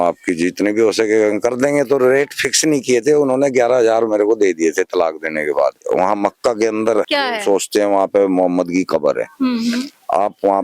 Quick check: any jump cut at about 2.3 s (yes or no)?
no